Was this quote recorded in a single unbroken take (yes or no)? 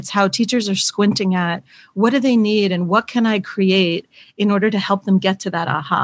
yes